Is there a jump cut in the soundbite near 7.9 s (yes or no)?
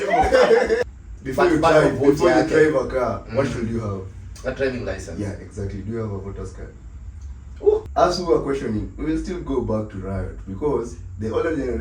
yes